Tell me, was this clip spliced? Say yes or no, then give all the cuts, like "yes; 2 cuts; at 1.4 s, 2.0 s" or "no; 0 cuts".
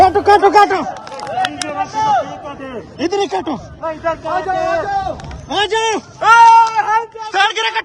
no; 0 cuts